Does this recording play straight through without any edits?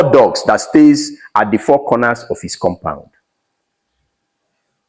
yes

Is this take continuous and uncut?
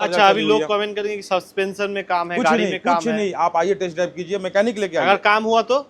yes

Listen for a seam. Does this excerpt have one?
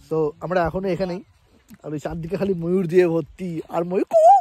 no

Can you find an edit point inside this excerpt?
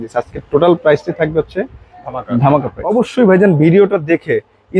yes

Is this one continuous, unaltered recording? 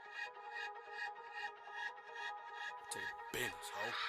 yes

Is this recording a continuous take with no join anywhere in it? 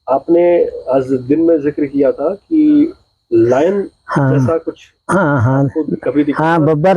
yes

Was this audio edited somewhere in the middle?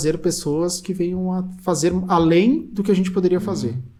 no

